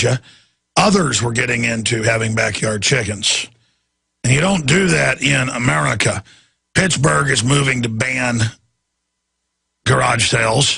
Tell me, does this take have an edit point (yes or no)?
yes